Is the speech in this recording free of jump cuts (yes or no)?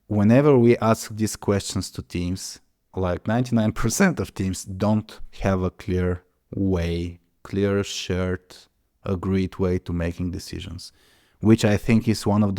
yes